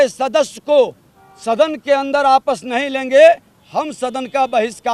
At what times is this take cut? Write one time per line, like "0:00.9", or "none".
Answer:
none

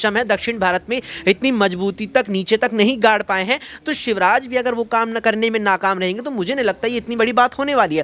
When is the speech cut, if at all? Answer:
none

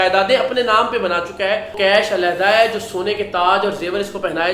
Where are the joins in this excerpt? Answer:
0:01.7

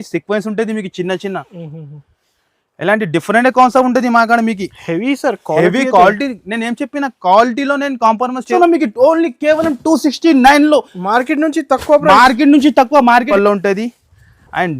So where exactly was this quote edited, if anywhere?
0:08.5
0:13.3

